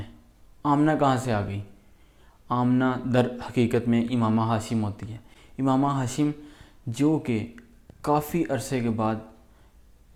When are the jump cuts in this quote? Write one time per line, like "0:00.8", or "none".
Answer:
none